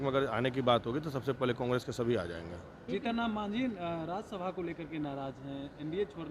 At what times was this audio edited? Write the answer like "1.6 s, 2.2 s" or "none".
2.6 s